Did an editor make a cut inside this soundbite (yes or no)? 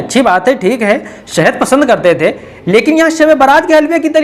no